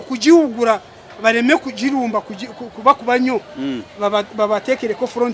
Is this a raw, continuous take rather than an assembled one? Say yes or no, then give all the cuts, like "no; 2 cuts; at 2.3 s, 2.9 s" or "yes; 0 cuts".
yes; 0 cuts